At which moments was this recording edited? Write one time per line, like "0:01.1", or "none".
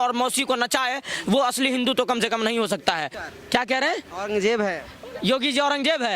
0:03.2